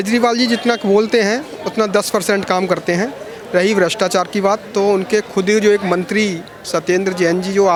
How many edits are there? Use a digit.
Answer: 0